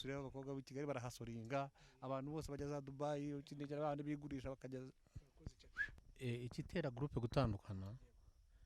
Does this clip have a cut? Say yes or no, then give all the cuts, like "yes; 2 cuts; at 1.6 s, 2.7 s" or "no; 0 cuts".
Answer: yes; 1 cut; at 6.1 s